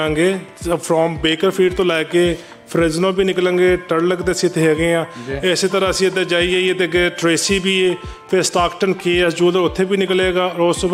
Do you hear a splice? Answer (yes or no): no